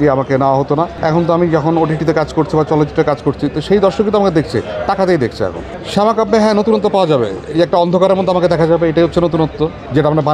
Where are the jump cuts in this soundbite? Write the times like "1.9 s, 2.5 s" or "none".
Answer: 0.9 s, 5.8 s